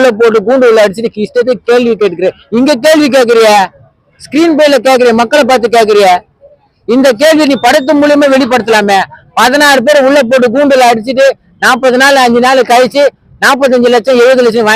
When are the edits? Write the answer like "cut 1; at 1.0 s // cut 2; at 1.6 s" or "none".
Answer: none